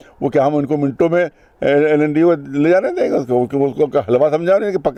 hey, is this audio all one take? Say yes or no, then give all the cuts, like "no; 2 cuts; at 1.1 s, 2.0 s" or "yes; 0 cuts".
yes; 0 cuts